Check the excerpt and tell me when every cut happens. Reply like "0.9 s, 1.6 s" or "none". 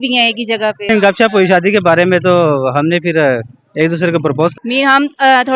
0.9 s, 4.6 s